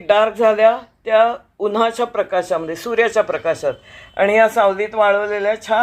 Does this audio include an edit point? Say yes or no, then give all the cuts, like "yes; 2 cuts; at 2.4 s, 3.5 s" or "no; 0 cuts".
no; 0 cuts